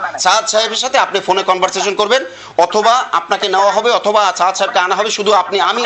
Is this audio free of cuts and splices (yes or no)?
yes